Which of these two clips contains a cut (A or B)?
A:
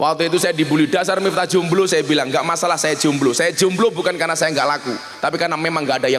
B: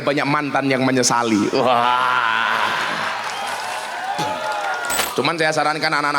B